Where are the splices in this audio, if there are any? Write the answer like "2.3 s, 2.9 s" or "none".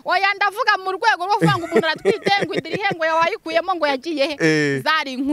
none